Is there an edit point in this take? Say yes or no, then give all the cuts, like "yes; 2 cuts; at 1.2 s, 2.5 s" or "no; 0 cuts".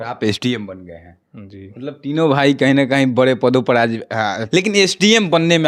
yes; 1 cut; at 4.4 s